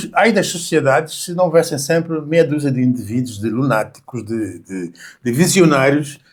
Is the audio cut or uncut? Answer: uncut